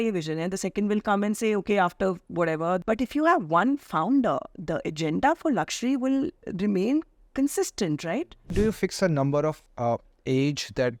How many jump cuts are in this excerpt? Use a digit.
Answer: 3